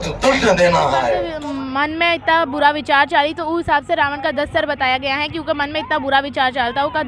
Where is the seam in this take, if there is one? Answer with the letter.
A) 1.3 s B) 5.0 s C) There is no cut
A